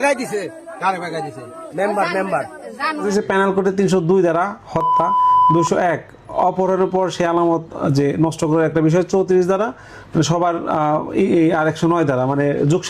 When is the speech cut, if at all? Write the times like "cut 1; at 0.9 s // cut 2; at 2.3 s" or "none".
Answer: cut 1; at 3.0 s

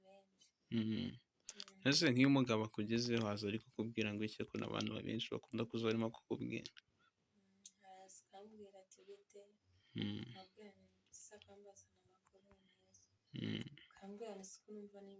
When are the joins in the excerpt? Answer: none

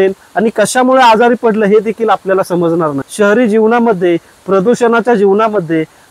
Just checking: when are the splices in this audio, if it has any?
cut 1; at 3.0 s

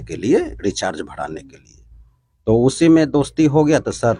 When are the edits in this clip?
none

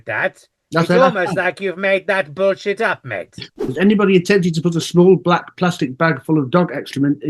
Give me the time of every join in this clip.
cut 1; at 3.6 s

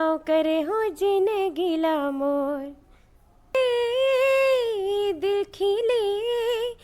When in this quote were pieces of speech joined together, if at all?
cut 1; at 3.5 s

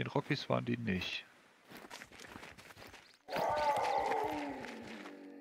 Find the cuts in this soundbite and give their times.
cut 1; at 1.8 s

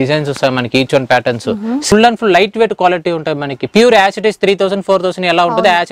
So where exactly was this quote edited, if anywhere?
cut 1; at 1.8 s

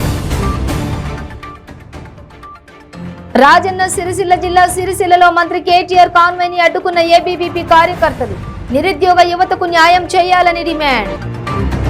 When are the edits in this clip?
cut 1; at 1.0 s

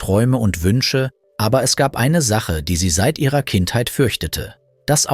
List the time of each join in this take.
cut 1; at 1.2 s

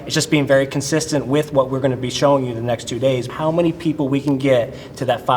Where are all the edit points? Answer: cut 1; at 3.3 s

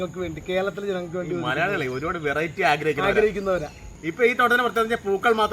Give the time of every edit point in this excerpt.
cut 1; at 3.8 s

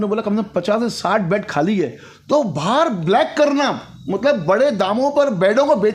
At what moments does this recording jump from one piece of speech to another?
none

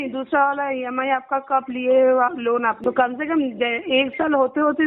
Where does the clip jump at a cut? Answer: cut 1; at 2.8 s

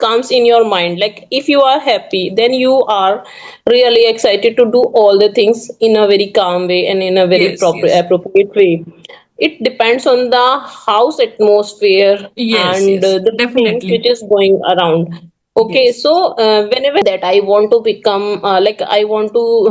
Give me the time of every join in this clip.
cut 1; at 17.0 s

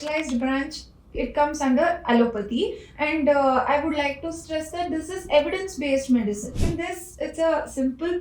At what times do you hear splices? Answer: cut 1; at 6.7 s

